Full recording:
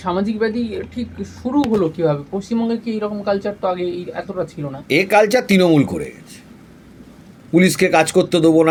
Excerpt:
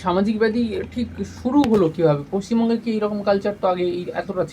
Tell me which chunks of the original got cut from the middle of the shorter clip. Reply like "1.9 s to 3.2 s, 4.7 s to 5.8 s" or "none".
none